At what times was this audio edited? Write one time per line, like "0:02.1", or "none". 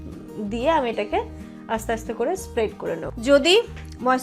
0:03.2